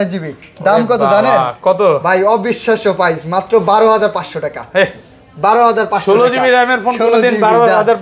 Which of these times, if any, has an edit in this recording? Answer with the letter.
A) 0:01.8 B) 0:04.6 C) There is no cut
C